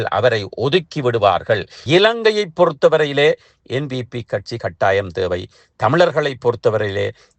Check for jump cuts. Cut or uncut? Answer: cut